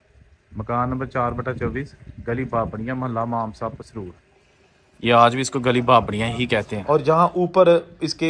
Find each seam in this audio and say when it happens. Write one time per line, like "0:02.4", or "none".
0:06.7